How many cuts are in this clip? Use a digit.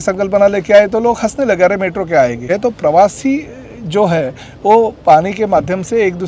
1